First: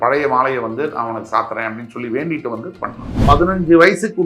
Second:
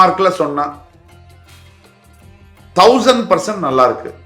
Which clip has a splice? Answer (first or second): first